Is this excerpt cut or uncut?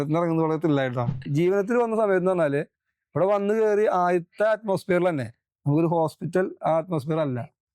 cut